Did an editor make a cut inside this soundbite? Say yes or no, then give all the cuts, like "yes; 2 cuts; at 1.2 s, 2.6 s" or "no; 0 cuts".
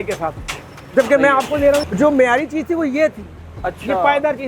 yes; 1 cut; at 1.8 s